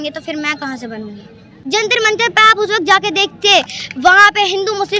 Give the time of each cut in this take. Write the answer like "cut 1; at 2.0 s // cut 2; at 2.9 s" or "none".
cut 1; at 1.6 s